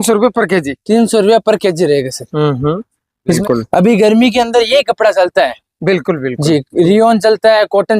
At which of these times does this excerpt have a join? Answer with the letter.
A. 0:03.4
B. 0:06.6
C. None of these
A